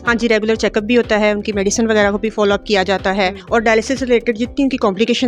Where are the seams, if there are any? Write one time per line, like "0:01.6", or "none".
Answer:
0:03.4